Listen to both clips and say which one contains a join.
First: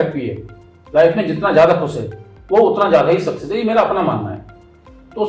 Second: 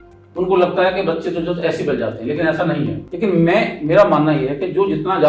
second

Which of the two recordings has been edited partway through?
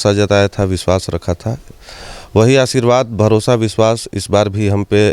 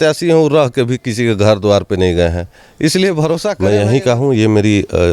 second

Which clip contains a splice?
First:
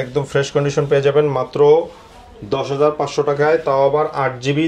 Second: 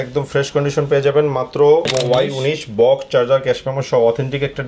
second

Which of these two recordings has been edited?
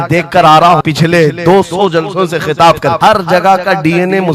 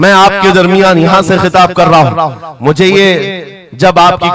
first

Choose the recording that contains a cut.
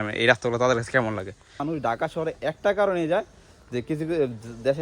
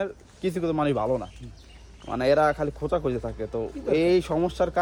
first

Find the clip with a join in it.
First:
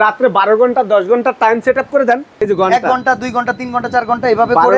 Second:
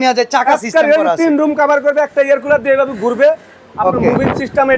first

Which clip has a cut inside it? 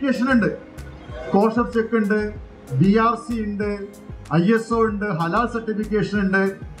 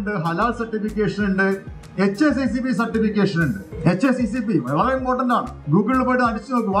second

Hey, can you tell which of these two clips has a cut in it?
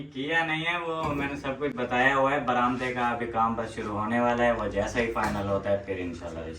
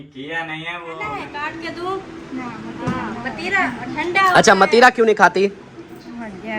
second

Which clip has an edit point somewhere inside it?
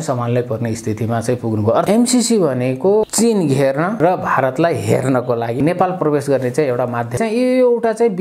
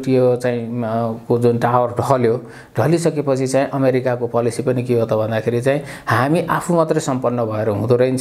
first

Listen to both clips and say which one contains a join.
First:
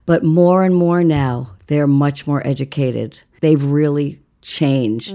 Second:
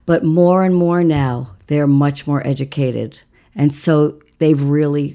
first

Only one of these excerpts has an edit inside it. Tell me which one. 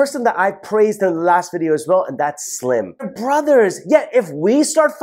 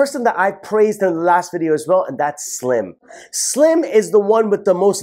first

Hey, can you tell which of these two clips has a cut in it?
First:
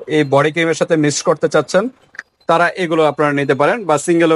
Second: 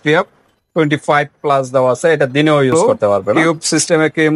second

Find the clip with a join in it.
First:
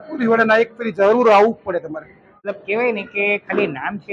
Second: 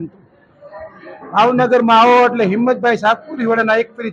first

